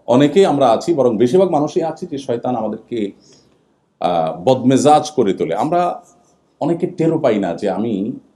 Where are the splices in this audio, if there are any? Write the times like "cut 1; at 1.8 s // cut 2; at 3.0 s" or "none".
none